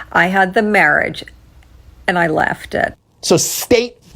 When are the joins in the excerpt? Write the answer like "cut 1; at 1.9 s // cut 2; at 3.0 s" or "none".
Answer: cut 1; at 3.1 s